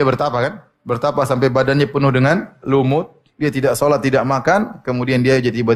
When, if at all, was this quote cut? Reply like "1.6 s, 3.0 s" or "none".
none